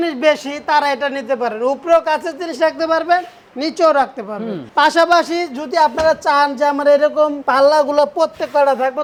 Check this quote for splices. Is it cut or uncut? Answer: uncut